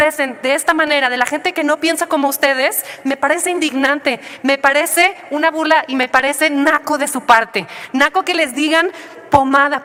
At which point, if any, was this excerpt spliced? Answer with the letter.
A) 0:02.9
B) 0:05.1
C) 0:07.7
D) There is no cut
D